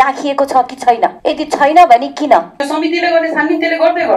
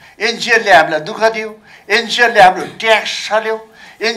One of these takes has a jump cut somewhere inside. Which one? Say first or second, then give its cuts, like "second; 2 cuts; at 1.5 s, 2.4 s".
first; 2 cuts; at 1.2 s, 2.6 s